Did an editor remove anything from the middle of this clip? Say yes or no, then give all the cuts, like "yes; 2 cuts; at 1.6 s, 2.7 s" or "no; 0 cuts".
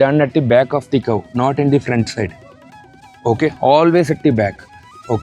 no; 0 cuts